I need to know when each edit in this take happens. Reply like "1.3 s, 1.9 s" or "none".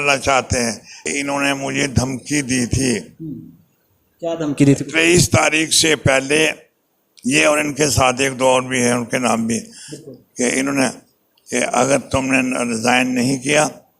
1.0 s